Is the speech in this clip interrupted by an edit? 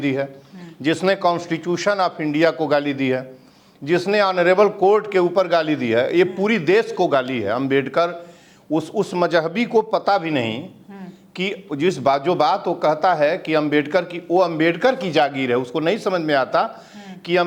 no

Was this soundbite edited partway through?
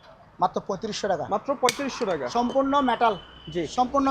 no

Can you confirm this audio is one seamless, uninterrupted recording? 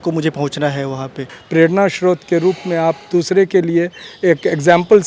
no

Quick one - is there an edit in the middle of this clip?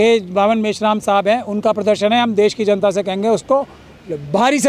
no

